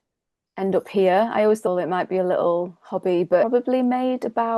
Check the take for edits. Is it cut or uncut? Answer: cut